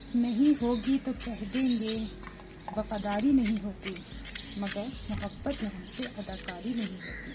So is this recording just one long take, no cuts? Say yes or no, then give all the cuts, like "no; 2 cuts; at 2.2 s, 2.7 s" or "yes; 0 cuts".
yes; 0 cuts